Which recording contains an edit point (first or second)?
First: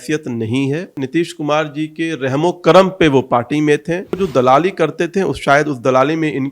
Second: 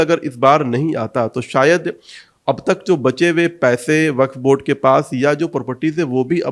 first